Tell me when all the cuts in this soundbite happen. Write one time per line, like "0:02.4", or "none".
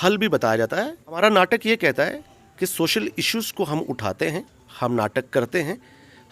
0:01.2